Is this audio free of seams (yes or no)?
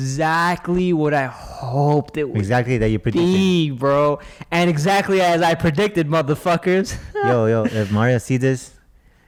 yes